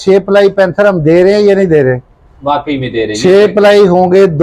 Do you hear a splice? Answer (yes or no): no